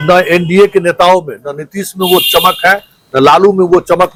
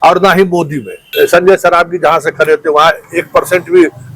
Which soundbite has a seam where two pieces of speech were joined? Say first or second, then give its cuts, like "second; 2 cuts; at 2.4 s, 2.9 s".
second; 1 cut; at 1.0 s